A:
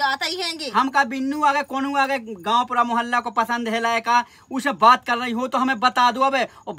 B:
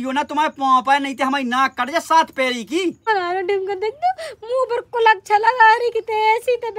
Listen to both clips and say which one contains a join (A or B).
B